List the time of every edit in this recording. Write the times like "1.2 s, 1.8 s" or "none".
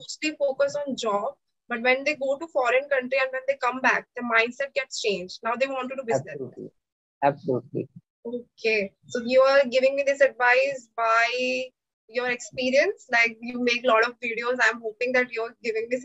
8.0 s